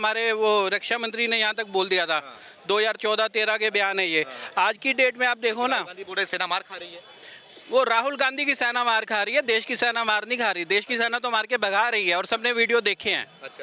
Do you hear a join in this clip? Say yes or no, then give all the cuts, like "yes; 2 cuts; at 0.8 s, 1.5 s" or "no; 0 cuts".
no; 0 cuts